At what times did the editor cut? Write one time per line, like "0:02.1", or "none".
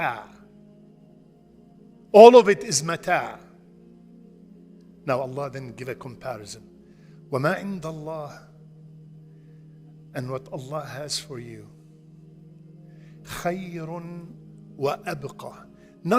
0:08.4
0:10.1